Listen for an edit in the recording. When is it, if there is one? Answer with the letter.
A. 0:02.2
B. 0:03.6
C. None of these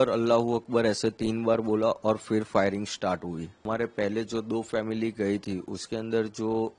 B